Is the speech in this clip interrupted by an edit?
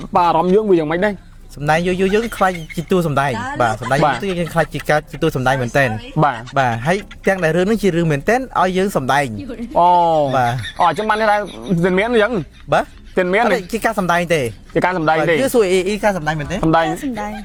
no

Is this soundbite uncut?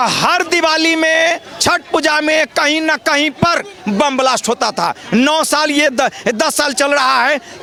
yes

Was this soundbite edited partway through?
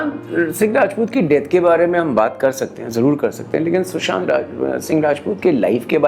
no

